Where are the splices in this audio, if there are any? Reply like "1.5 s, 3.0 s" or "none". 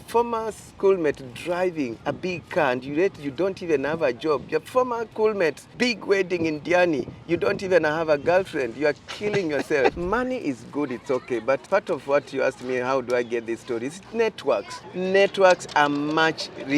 2.0 s, 5.1 s, 5.6 s, 10.0 s, 11.6 s, 14.8 s